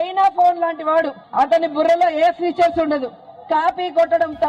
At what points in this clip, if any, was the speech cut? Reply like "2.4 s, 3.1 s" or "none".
1.2 s